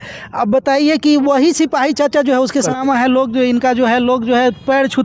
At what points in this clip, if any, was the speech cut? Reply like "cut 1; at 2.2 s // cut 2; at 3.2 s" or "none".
cut 1; at 2.7 s

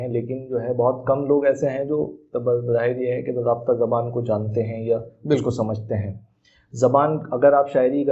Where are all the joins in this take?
none

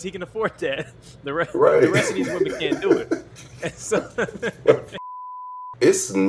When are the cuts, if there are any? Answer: cut 1; at 5.4 s

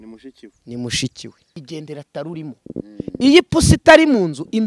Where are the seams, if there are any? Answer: cut 1; at 1.5 s

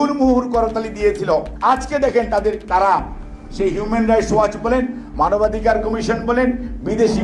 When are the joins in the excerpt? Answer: cut 1; at 1.5 s

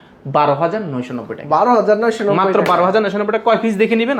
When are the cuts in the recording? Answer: none

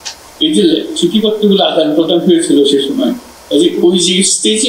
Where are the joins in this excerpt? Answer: cut 1; at 3.3 s

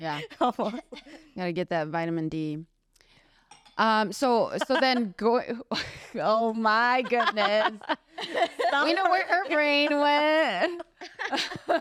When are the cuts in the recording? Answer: none

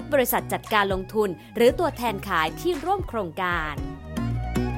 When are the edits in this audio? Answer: cut 1; at 3.6 s

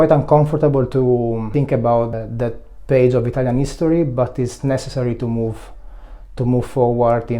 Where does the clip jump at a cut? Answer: cut 1; at 1.5 s // cut 2; at 2.1 s

